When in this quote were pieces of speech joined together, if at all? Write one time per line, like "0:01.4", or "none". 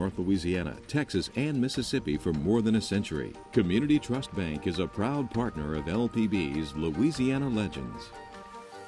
none